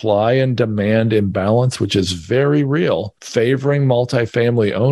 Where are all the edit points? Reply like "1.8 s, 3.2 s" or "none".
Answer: 3.2 s